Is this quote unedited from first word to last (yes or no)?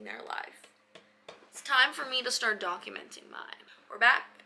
no